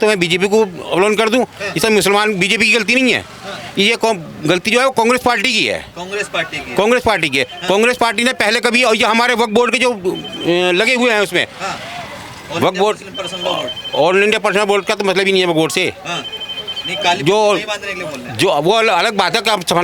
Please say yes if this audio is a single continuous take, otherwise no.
yes